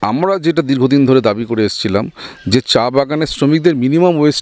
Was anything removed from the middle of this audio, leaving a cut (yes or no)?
no